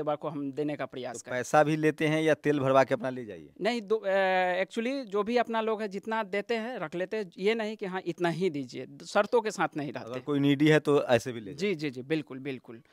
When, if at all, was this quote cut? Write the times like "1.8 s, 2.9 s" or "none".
none